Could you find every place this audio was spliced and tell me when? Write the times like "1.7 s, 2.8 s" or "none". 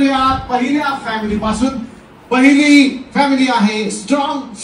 none